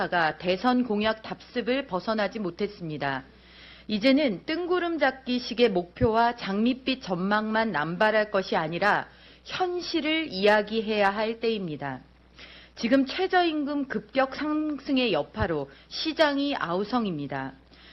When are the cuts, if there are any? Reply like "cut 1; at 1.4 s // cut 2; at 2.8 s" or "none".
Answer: cut 1; at 12.9 s